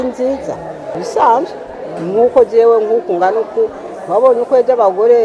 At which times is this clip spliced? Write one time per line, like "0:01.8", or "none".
0:01.0